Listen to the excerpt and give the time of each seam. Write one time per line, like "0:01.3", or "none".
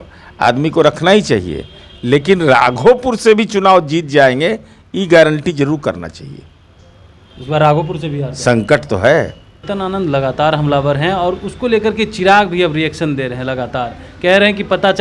0:09.6